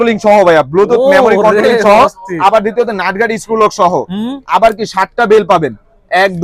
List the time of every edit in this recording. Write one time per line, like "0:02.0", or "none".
none